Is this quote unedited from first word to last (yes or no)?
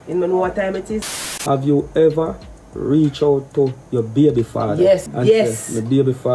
no